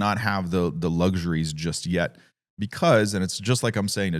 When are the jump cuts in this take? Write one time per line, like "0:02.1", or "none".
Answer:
none